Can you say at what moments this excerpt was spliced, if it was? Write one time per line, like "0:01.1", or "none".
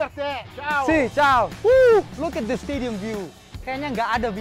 0:01.5